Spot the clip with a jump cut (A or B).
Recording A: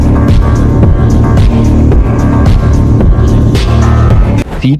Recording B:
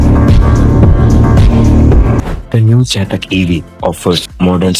B